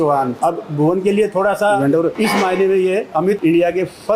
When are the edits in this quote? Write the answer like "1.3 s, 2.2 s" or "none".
1.8 s